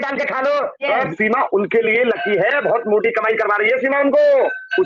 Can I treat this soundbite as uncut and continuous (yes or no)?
no